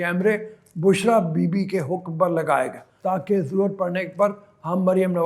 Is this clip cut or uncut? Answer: cut